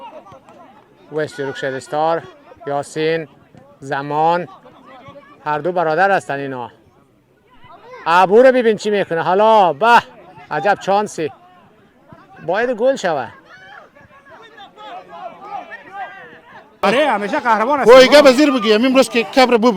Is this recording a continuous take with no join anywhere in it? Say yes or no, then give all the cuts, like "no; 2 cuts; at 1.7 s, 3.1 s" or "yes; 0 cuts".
no; 1 cut; at 16.8 s